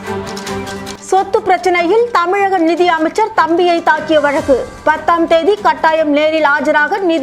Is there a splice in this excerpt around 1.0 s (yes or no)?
yes